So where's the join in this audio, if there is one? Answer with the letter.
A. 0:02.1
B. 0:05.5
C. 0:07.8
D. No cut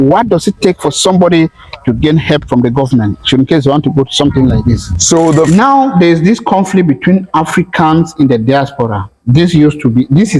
B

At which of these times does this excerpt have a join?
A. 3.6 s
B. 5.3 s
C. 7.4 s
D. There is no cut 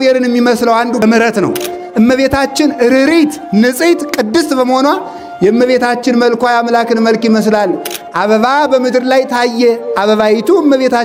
D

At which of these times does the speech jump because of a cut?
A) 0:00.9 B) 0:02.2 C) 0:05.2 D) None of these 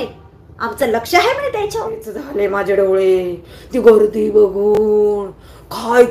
B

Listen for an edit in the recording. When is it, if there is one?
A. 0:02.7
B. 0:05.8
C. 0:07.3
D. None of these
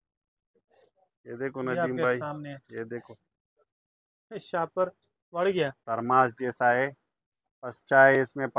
B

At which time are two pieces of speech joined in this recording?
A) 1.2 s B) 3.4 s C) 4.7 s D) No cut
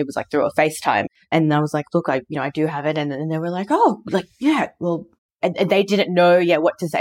A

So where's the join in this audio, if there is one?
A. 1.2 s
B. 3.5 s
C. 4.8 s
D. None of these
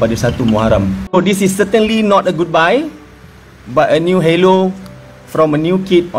A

